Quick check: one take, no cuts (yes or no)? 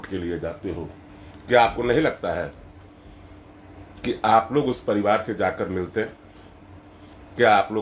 yes